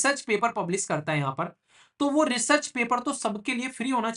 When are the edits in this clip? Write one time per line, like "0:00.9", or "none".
none